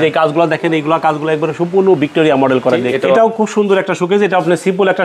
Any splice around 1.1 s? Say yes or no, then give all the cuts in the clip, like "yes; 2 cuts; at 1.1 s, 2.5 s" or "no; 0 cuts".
no; 1 cut; at 2.9 s